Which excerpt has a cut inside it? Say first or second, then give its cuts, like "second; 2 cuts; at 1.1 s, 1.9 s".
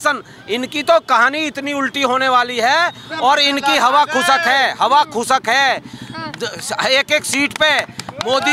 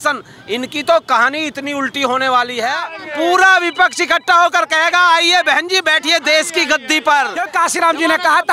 second; 2 cuts; at 3.0 s, 7.4 s